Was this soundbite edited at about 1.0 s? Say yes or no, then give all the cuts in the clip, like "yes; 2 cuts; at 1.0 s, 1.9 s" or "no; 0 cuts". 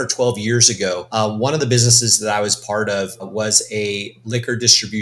yes; 1 cut; at 1.0 s